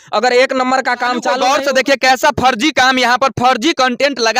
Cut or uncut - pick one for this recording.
cut